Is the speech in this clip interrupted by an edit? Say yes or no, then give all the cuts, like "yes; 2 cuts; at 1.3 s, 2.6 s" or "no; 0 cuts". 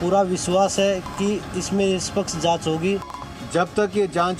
yes; 1 cut; at 3.1 s